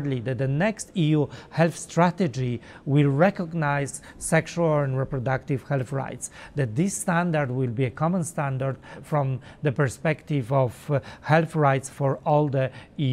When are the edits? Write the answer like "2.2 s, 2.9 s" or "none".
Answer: none